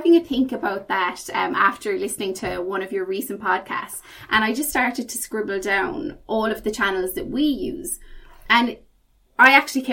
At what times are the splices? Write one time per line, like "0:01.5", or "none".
none